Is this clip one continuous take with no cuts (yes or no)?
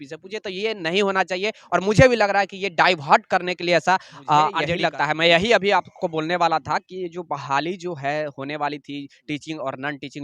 no